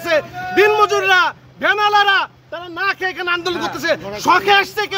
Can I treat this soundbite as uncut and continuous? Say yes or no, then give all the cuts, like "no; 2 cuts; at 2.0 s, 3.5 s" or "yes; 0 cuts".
yes; 0 cuts